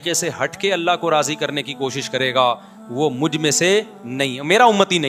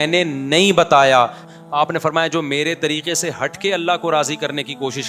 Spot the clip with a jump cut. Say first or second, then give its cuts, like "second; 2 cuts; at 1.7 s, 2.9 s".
second; 1 cut; at 1.4 s